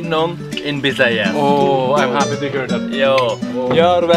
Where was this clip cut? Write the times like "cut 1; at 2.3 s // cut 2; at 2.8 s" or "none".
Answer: none